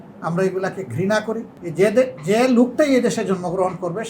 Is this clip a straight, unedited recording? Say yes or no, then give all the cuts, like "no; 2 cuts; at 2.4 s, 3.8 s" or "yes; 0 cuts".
no; 1 cut; at 1.6 s